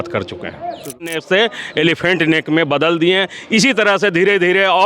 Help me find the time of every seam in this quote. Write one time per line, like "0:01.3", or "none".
0:01.2